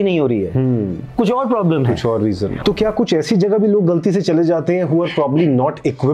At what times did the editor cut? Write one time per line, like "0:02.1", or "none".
0:02.5